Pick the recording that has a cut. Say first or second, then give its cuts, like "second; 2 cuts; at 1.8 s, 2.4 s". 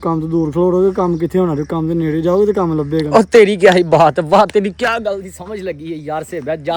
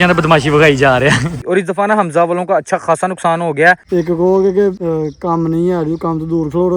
second; 3 cuts; at 1.4 s, 3.8 s, 4.8 s